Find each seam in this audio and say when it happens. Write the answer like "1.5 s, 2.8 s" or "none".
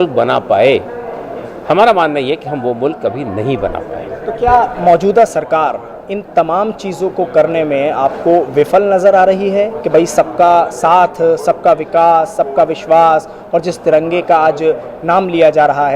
none